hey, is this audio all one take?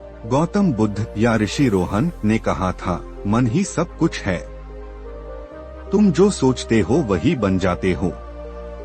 no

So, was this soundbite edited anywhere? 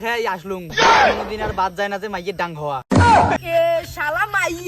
yes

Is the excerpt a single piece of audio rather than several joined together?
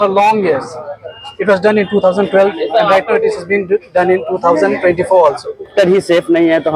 no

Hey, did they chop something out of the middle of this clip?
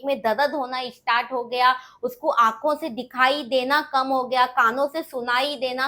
no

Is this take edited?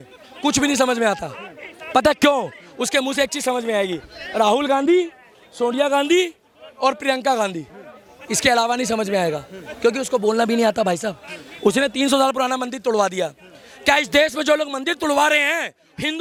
no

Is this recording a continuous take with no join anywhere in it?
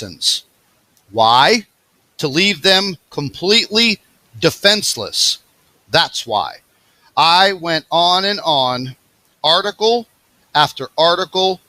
no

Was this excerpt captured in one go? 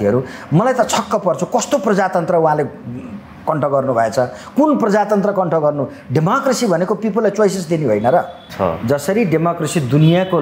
no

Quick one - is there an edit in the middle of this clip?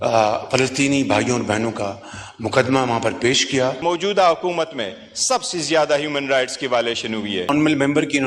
yes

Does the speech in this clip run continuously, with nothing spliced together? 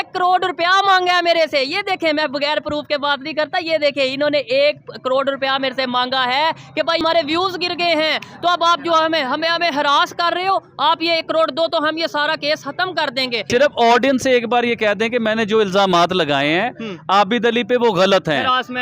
no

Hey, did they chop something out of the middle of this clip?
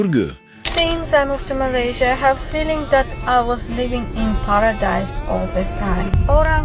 no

